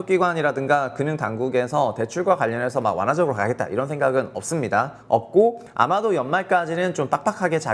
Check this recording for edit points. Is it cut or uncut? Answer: cut